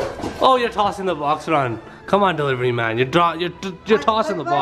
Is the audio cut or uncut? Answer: uncut